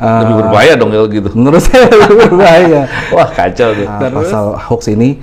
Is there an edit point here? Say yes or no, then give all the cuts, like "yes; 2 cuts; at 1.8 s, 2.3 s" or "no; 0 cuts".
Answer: yes; 1 cut; at 4.2 s